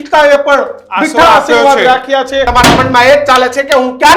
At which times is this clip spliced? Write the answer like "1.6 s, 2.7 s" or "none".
2.5 s